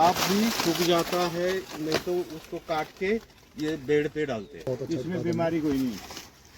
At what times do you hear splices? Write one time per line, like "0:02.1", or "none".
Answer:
0:04.6